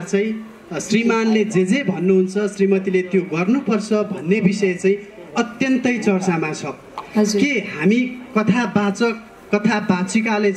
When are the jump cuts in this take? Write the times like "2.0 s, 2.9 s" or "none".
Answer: none